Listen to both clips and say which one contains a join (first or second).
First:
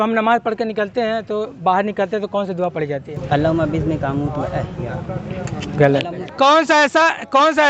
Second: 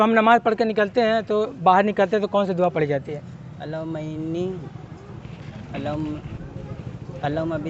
first